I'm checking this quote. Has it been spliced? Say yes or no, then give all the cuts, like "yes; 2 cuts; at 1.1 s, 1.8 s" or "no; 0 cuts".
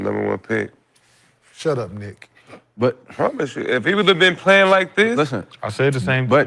no; 0 cuts